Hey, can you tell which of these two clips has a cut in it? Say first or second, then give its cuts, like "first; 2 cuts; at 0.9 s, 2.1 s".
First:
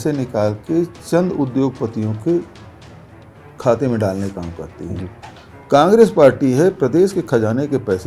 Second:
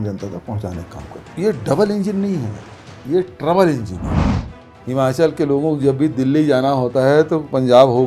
second; 2 cuts; at 1.2 s, 4.3 s